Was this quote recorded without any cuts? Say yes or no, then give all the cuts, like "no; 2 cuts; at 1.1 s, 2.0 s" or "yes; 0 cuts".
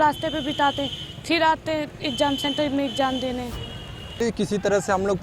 no; 1 cut; at 4.2 s